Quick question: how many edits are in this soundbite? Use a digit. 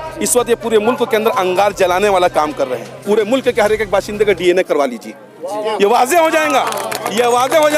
1